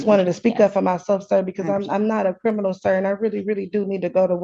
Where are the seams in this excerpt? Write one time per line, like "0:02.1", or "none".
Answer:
none